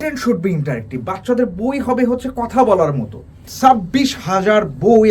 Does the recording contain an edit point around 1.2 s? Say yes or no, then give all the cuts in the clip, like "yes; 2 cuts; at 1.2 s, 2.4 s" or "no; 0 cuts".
no; 1 cut; at 3.5 s